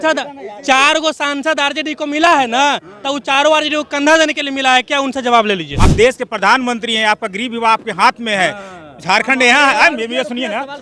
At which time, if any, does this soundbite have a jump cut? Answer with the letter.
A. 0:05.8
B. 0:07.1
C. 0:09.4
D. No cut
A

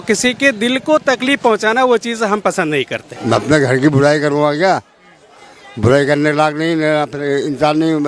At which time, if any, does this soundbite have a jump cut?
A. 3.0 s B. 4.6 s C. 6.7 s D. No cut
A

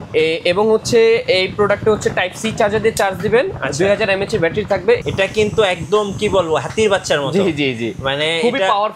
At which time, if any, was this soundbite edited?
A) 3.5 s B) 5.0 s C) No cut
B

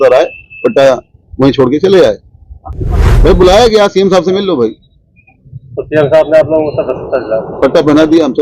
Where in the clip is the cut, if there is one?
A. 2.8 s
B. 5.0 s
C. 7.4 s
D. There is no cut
A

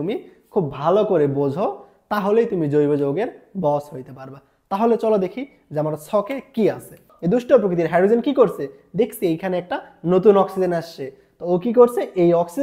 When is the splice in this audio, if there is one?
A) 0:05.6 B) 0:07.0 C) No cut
B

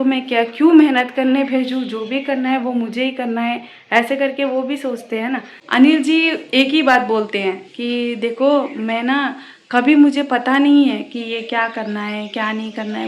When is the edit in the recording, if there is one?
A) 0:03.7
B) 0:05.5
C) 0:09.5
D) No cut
B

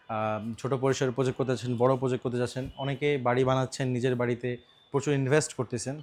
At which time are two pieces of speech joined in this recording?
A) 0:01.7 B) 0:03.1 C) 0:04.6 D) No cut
D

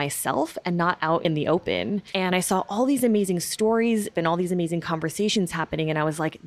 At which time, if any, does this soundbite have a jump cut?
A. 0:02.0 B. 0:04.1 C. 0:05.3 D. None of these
B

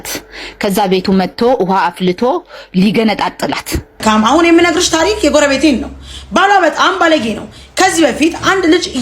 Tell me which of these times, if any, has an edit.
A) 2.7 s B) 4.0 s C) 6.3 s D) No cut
B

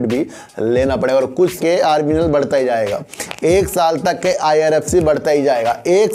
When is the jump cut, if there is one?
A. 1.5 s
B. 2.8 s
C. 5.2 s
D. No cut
A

